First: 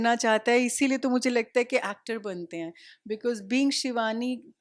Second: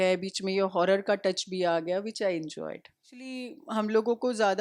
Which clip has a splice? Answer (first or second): second